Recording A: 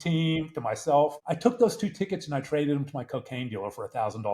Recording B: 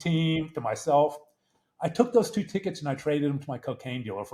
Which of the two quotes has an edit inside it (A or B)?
A